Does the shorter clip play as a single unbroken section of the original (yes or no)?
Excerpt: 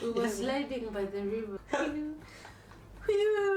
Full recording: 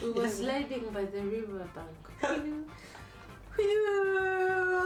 no